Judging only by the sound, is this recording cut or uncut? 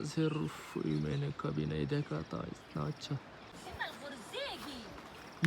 cut